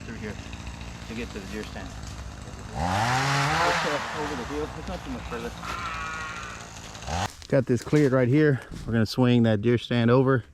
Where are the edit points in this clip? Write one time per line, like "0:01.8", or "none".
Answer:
0:07.3